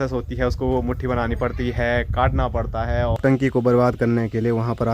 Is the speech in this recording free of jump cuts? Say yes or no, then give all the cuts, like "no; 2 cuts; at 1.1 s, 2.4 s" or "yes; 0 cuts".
no; 1 cut; at 3.2 s